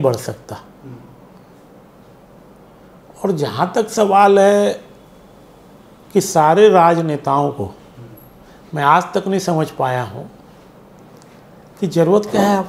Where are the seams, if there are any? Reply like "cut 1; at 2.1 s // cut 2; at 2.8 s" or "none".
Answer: none